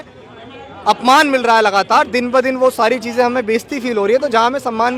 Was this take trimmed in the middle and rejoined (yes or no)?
no